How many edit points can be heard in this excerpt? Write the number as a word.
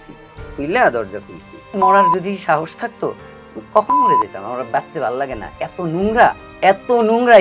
two